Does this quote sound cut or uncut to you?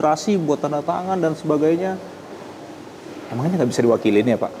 uncut